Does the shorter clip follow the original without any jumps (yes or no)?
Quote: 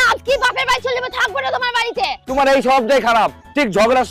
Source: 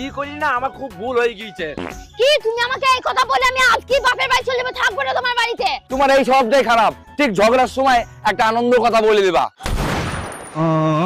yes